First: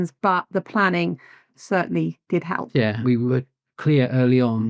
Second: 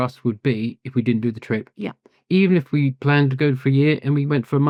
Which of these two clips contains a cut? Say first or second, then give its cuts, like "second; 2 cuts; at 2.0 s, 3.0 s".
first; 2 cuts; at 1.5 s, 3.0 s